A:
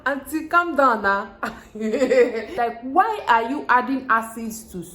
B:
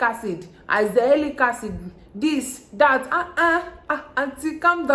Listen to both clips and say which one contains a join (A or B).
A